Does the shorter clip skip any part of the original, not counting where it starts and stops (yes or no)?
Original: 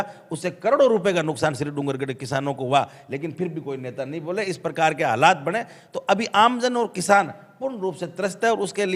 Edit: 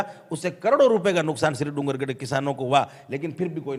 no